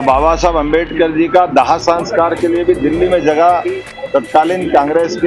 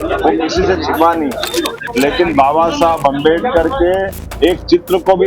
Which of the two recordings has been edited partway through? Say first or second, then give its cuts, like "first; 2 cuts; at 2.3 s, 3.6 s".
second; 1 cut; at 1.8 s